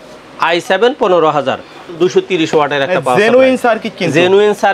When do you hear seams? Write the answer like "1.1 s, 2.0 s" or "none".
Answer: 1.9 s